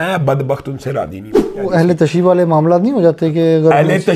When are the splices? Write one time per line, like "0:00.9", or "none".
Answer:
0:01.7